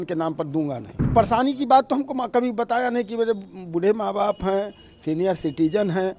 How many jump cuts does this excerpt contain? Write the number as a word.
one